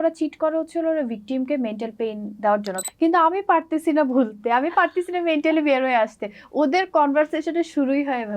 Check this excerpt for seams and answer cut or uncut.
cut